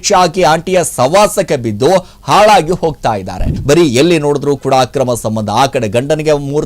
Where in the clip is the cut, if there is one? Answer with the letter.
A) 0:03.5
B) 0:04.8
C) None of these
A